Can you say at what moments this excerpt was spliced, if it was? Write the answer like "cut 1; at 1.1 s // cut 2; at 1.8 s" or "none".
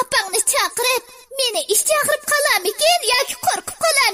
cut 1; at 1.2 s